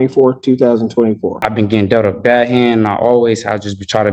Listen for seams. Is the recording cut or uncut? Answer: cut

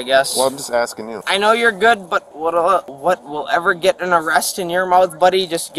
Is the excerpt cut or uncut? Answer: cut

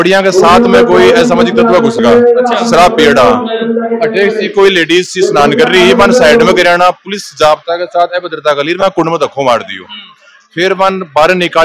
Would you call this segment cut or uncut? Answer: uncut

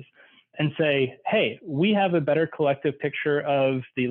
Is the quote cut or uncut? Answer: uncut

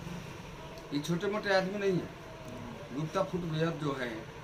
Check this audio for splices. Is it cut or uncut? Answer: uncut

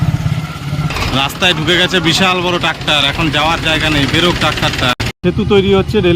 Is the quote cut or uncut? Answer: cut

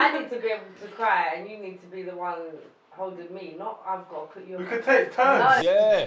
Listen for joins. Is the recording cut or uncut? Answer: uncut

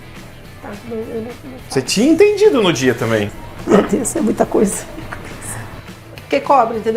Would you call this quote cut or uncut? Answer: cut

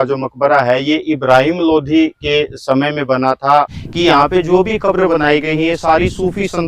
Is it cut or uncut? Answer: cut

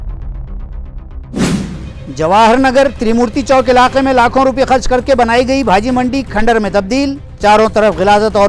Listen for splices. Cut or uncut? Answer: cut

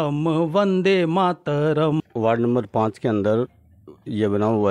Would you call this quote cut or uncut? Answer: cut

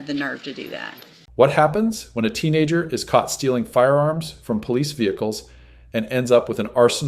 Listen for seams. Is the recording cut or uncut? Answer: cut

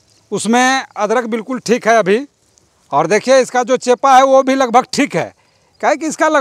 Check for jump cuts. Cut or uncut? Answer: uncut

